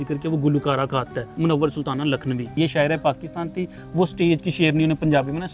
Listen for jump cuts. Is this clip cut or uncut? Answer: cut